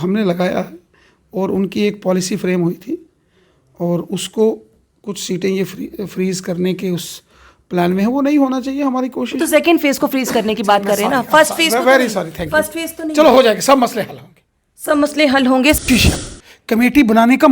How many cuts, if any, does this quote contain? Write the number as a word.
one